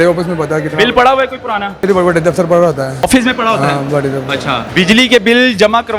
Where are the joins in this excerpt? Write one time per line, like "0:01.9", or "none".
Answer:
0:01.8
0:03.1
0:04.6